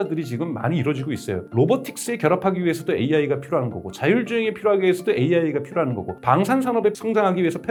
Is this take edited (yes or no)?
no